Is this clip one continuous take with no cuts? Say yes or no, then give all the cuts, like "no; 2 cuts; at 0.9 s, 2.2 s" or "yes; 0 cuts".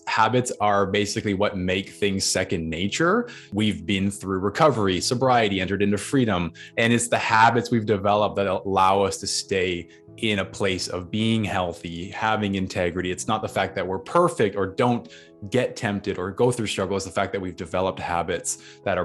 no; 2 cuts; at 3.5 s, 6.6 s